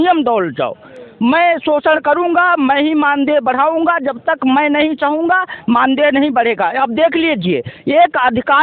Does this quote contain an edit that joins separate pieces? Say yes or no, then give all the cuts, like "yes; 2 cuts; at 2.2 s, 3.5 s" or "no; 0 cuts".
no; 0 cuts